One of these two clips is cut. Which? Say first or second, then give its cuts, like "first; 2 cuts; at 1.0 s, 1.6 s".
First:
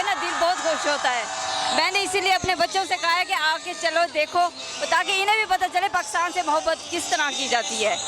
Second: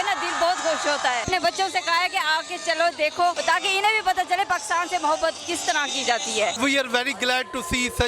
second; 3 cuts; at 1.3 s, 3.4 s, 6.5 s